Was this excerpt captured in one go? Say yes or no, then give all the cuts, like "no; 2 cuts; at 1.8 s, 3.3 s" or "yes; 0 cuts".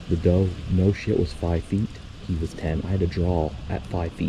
yes; 0 cuts